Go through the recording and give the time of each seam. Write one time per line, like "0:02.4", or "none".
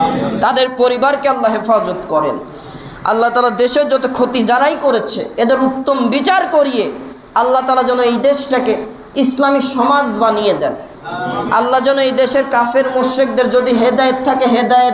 none